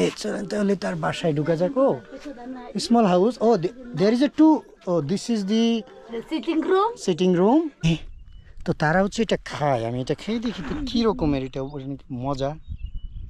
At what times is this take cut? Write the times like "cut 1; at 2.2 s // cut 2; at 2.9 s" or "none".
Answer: cut 1; at 7.8 s